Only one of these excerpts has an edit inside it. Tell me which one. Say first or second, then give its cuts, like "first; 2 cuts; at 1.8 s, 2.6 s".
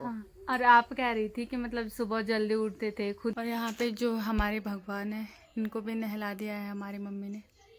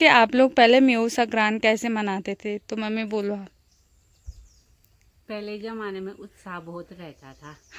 first; 1 cut; at 3.3 s